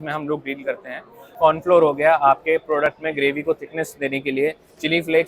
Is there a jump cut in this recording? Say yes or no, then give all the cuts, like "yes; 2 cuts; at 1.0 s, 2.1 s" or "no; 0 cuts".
yes; 1 cut; at 1.3 s